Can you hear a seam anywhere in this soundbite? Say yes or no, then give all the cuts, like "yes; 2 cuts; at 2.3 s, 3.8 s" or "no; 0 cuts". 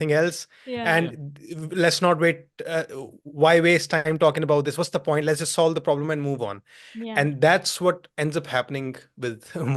no; 0 cuts